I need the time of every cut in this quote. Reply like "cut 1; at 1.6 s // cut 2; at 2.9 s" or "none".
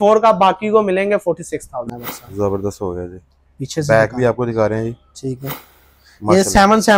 cut 1; at 1.8 s